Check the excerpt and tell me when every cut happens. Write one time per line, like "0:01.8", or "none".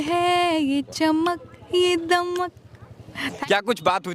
0:03.2